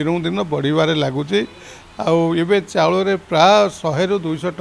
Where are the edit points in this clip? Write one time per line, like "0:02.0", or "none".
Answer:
none